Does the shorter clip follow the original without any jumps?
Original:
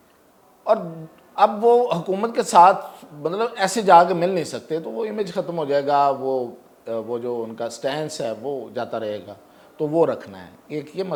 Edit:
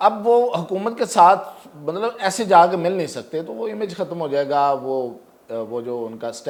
yes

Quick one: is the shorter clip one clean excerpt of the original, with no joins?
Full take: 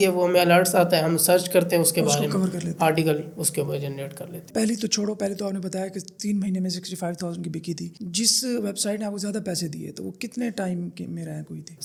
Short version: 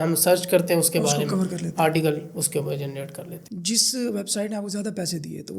no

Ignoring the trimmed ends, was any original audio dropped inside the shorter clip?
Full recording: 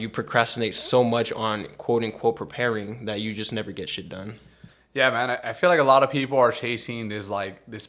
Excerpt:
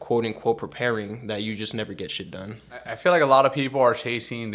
yes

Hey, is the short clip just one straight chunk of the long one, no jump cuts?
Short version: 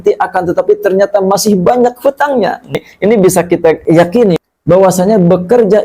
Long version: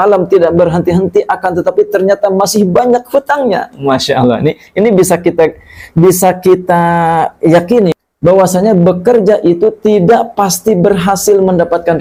no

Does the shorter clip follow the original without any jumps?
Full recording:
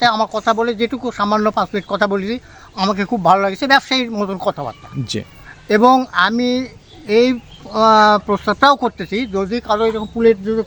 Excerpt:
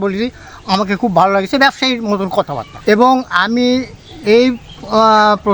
no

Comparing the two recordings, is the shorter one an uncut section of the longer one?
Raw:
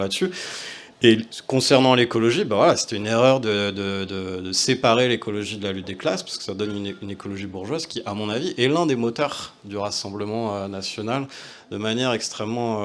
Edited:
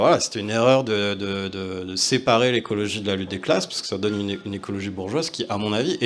yes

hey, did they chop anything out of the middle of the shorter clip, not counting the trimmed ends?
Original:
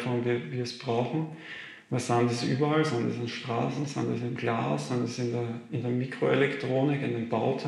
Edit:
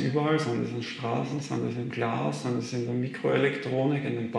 yes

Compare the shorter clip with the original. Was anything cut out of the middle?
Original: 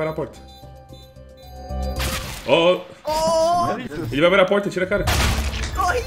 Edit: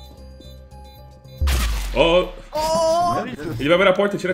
no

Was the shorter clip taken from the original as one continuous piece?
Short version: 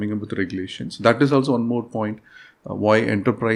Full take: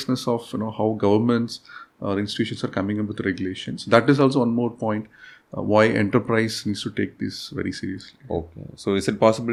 yes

